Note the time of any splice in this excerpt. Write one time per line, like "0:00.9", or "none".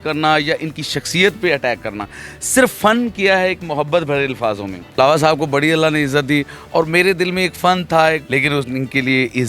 0:05.0
0:08.2